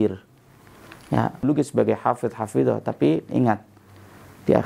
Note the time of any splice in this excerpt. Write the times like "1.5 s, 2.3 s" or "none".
1.4 s